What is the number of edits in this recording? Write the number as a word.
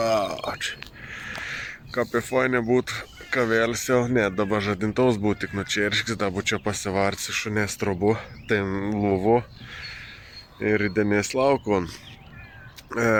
zero